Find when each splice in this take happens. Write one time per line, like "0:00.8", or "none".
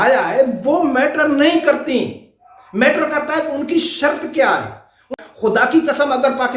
0:05.1